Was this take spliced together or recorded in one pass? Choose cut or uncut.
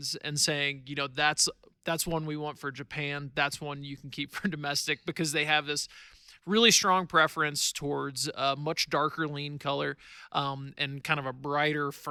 uncut